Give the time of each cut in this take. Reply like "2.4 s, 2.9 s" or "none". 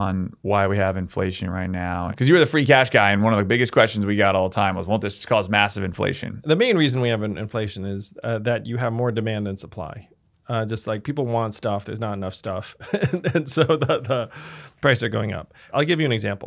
2.1 s, 6.3 s, 15.6 s